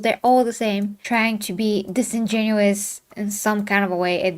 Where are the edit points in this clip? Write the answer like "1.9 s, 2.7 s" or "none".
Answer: 1.0 s